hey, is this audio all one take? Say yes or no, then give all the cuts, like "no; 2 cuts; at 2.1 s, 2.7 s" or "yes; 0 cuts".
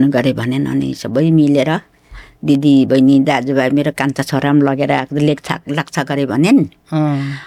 yes; 0 cuts